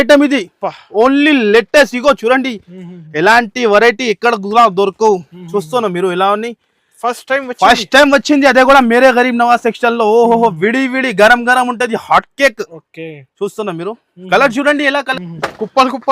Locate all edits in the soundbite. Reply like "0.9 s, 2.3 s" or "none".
15.2 s